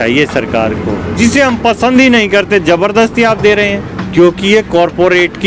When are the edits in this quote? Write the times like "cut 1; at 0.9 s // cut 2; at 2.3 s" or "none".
cut 1; at 3.9 s